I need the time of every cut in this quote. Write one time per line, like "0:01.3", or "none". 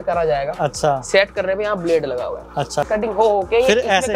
0:02.9